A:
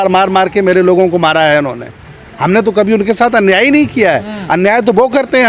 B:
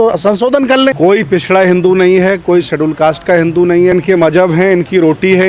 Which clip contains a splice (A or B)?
B